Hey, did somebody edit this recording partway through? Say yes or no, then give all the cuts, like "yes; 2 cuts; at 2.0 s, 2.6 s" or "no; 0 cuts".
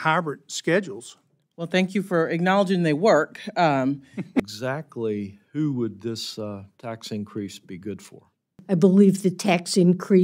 yes; 2 cuts; at 4.4 s, 8.6 s